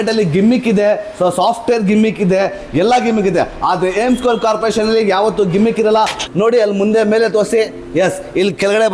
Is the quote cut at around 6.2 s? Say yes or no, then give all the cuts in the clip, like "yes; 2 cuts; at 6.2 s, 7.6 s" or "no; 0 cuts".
yes; 1 cut; at 6.2 s